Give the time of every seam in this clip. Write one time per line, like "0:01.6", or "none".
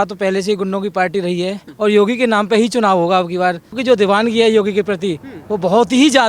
0:01.7
0:03.8